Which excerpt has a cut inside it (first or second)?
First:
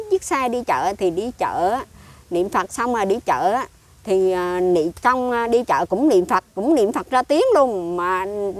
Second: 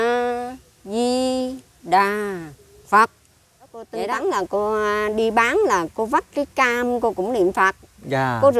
second